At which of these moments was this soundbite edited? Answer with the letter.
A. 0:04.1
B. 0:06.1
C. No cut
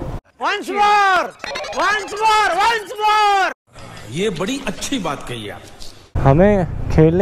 B